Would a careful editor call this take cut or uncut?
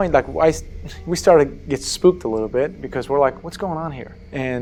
uncut